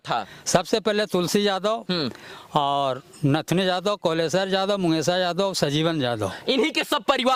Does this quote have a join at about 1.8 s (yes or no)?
no